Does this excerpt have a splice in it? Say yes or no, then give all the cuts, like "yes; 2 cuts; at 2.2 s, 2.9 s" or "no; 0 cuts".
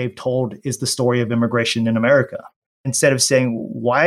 yes; 1 cut; at 2.9 s